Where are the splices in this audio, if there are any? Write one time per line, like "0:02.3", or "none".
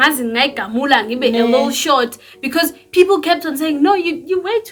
none